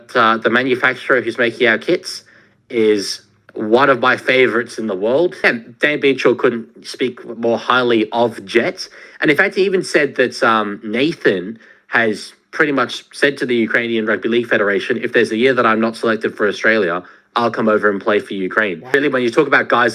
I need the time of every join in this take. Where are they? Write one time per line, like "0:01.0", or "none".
0:05.5
0:18.9